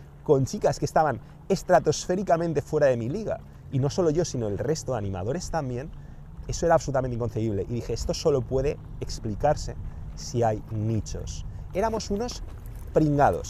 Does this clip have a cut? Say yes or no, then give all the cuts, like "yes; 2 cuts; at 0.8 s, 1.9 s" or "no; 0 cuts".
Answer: yes; 1 cut; at 11.1 s